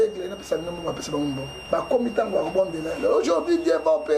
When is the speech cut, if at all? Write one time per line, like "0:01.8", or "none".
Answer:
0:01.5